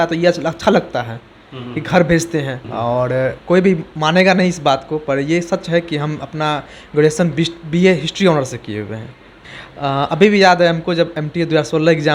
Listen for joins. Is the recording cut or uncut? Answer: cut